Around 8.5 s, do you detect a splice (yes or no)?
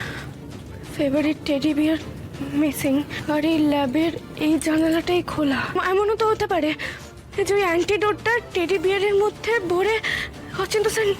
yes